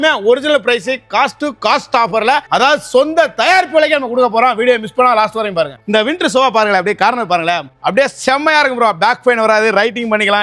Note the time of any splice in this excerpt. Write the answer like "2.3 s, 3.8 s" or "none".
2.4 s, 5.8 s, 7.7 s